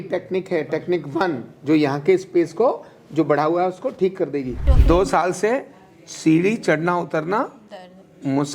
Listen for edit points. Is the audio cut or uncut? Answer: cut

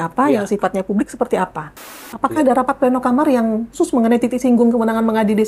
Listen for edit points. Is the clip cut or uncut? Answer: cut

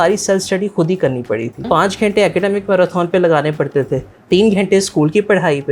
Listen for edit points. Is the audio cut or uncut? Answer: cut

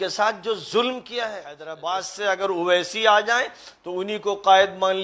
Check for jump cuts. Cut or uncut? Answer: cut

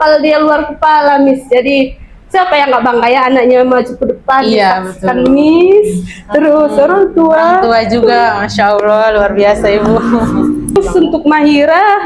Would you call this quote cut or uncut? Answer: cut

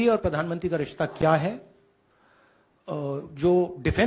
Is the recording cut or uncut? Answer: uncut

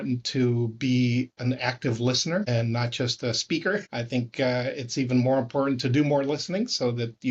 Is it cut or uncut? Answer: cut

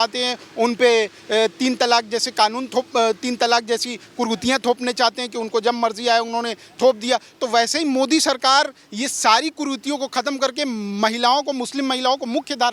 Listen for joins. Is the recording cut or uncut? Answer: uncut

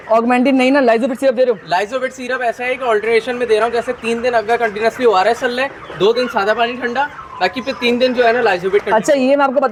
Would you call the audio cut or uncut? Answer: uncut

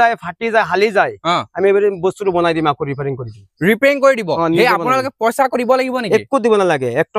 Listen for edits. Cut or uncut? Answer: uncut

